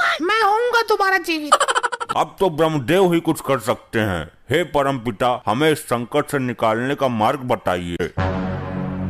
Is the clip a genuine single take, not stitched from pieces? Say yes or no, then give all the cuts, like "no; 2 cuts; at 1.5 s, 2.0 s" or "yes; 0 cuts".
no; 2 cuts; at 2.0 s, 8.1 s